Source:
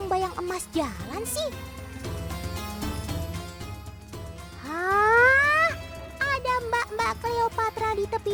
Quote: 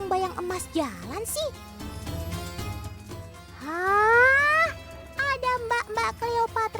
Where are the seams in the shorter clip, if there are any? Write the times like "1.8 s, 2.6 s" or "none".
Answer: 1.6 s